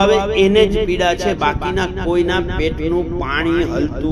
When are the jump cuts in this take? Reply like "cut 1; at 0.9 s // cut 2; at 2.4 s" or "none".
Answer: none